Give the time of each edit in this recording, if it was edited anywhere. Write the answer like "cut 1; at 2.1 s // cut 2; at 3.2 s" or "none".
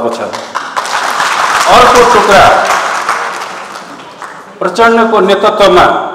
none